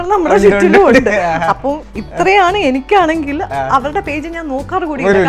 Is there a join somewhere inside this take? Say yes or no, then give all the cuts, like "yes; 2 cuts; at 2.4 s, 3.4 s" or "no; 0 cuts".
no; 0 cuts